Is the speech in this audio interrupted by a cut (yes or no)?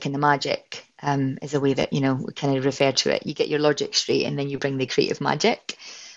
no